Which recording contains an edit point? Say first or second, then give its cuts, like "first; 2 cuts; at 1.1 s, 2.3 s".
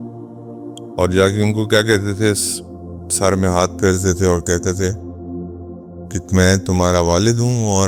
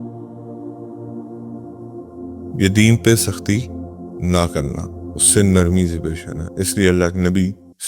second; 2 cuts; at 0.9 s, 2.5 s